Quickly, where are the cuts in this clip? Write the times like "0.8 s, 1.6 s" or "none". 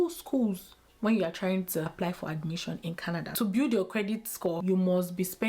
1.9 s, 3.3 s, 4.6 s